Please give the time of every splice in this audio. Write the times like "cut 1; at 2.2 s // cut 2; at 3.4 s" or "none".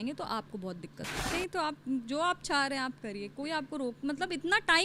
cut 1; at 1.1 s